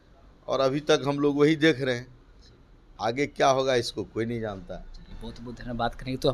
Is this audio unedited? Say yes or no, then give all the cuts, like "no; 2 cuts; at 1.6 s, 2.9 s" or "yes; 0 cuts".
yes; 0 cuts